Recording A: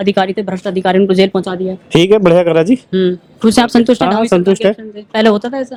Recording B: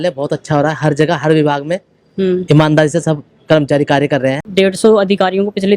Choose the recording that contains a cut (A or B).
B